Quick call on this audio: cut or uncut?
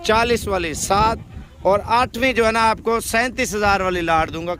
uncut